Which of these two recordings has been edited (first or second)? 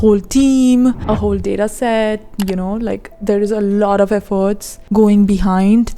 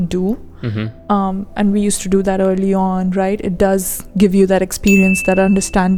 first